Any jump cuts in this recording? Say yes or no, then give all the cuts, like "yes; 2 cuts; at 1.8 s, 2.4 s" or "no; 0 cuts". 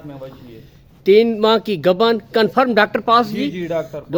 no; 0 cuts